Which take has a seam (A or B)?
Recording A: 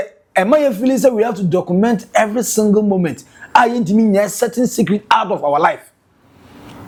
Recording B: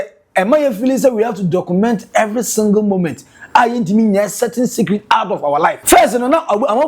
B